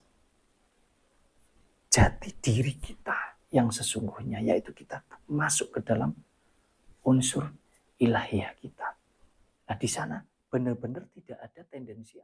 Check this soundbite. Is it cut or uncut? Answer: uncut